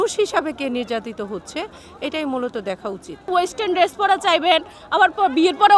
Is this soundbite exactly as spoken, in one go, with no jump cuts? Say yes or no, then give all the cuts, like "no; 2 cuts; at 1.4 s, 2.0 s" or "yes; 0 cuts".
no; 1 cut; at 3.3 s